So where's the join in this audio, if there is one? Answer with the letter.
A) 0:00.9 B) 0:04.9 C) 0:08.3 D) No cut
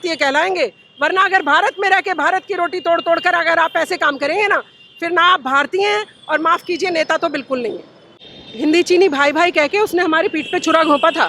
C